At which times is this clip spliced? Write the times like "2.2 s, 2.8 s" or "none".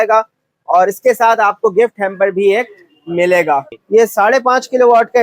3.7 s